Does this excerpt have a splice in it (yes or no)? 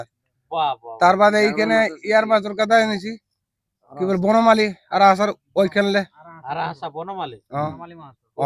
no